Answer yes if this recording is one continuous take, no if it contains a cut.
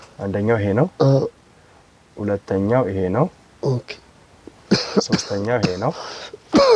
yes